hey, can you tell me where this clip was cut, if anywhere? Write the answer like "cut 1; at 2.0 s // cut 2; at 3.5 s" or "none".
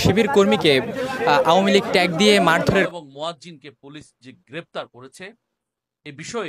cut 1; at 2.9 s